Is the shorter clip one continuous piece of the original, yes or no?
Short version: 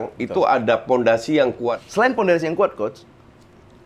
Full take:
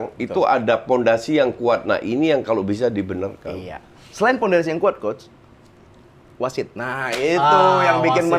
no